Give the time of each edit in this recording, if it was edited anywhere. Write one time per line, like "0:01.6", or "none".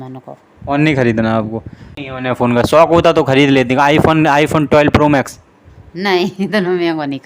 0:02.0